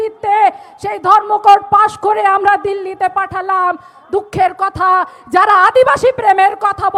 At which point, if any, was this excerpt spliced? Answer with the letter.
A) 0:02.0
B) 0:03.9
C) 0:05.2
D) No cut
D